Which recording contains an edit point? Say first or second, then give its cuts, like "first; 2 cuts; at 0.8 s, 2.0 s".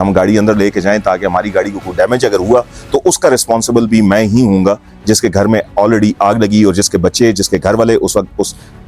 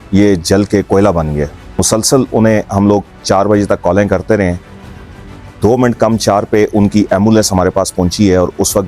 second; 1 cut; at 1.6 s